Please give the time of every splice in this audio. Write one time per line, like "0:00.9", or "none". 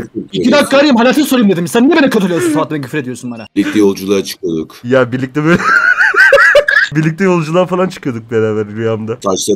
0:03.4
0:06.8